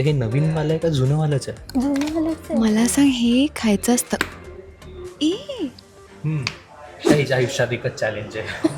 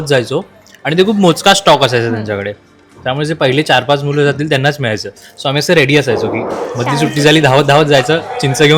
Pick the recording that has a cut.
first; 1 cut; at 7.1 s

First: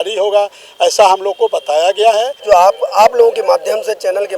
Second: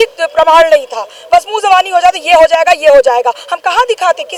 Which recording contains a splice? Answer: first; 1 cut; at 2.4 s

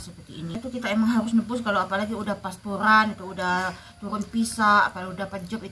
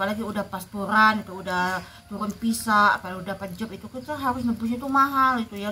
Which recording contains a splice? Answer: first; 1 cut; at 1.0 s

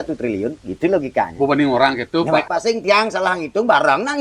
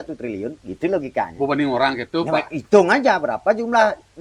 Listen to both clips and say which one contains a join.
first; 1 cut; at 2.5 s

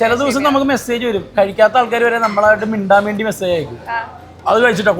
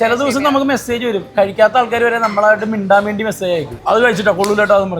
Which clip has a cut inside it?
second; 1 cut; at 3.7 s

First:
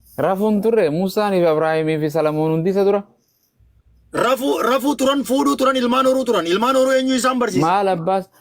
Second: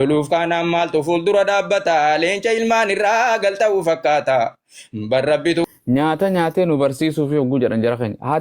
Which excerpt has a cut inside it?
second; 1 cut; at 5.7 s

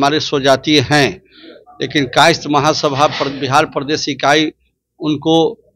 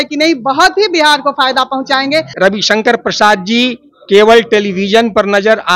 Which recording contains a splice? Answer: second; 1 cut; at 2.3 s

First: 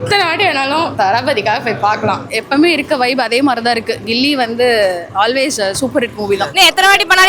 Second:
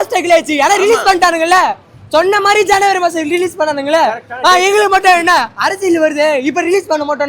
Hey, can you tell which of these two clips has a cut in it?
first; 3 cuts; at 0.9 s, 2.2 s, 6.5 s

